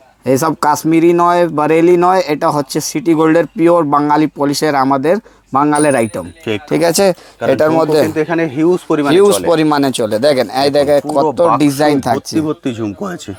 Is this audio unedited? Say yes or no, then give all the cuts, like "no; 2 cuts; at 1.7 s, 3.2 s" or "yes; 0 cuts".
yes; 0 cuts